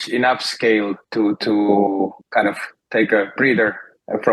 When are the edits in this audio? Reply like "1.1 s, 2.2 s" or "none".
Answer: 1.0 s, 2.2 s